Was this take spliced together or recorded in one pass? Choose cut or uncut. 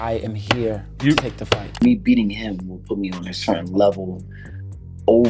cut